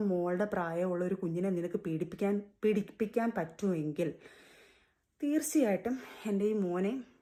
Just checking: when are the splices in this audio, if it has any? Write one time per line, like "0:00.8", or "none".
none